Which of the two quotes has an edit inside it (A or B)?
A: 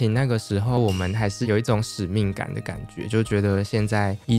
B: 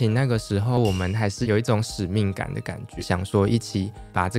B